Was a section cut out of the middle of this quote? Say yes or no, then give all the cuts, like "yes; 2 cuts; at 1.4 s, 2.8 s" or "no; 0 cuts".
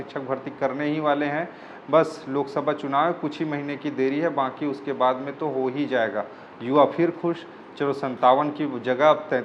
no; 0 cuts